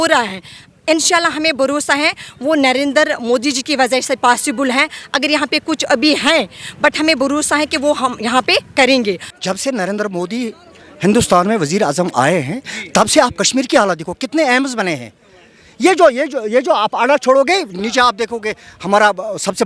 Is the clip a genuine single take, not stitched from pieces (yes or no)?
no